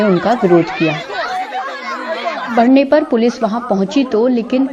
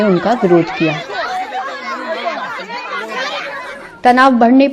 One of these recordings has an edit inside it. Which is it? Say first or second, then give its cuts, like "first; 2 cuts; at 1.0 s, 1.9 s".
first; 1 cut; at 2.5 s